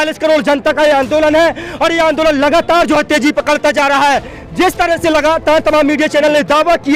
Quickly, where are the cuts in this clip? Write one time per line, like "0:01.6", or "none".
none